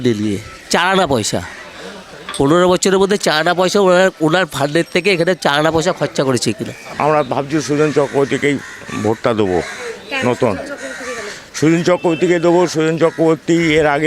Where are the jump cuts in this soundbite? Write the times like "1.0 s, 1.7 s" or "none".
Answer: 6.9 s